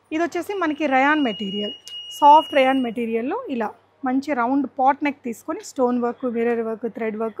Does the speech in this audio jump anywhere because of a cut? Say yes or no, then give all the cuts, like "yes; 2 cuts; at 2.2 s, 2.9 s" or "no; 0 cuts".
no; 0 cuts